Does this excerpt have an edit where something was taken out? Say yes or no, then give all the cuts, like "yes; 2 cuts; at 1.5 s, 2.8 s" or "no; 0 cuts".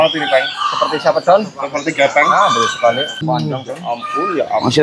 yes; 1 cut; at 3.2 s